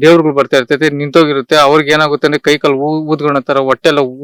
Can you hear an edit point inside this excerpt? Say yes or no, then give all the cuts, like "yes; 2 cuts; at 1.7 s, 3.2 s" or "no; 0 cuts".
no; 0 cuts